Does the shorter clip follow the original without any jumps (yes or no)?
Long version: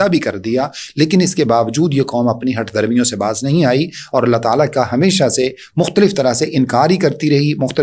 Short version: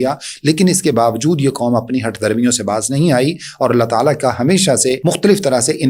no